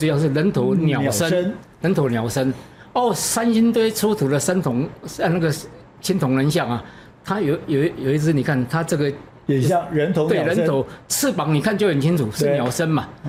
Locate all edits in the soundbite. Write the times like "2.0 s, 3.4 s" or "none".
none